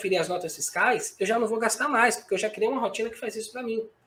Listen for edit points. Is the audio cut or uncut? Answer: uncut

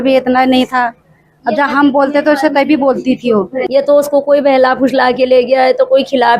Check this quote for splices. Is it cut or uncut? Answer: cut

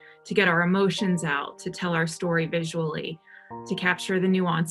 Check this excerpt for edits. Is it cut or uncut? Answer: uncut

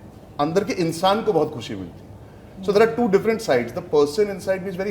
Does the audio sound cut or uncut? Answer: uncut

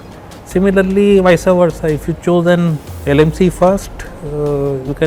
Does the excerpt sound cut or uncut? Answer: uncut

